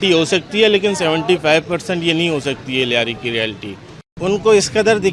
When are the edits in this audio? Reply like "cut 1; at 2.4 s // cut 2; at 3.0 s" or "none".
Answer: cut 1; at 4.2 s